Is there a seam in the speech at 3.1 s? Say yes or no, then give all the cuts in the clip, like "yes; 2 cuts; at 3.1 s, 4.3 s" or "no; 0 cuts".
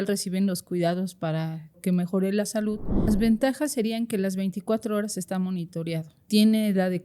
yes; 3 cuts; at 1.8 s, 3.1 s, 6.2 s